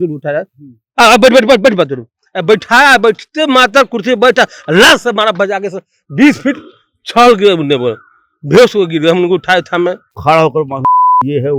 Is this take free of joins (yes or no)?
no